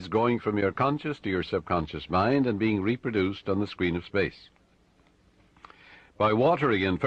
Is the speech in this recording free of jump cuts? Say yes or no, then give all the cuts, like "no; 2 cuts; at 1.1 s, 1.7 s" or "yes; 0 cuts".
no; 1 cut; at 1.5 s